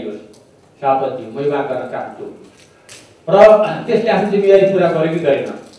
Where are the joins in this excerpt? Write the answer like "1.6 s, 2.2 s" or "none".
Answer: none